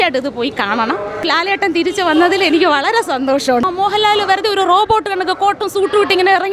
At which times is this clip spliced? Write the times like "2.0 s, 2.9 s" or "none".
1.2 s, 3.6 s